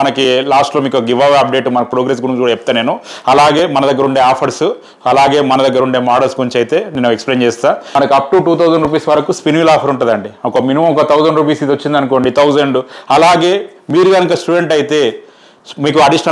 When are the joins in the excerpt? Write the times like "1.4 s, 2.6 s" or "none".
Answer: 7.8 s